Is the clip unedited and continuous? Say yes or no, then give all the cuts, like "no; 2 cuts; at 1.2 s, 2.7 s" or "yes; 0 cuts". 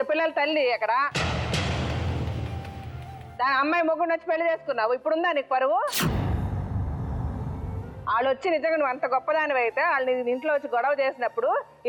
yes; 0 cuts